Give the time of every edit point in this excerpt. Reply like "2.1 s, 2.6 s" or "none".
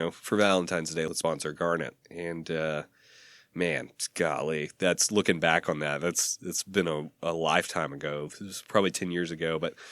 1.1 s